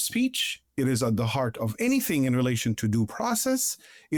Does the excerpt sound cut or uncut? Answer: uncut